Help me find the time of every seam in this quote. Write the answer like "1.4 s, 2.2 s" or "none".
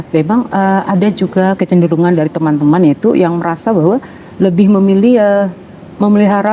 1.5 s